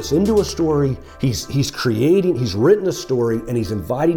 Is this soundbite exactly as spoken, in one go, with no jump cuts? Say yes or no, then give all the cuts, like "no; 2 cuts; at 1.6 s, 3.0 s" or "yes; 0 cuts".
yes; 0 cuts